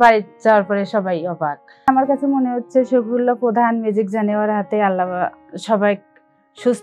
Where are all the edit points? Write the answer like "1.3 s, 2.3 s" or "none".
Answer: none